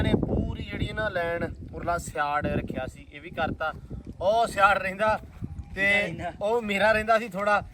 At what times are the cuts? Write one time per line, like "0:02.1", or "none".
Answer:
none